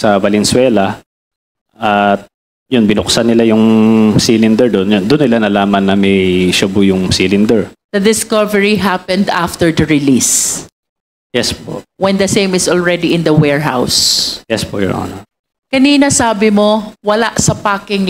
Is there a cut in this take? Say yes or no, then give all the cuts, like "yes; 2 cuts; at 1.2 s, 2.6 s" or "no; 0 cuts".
no; 0 cuts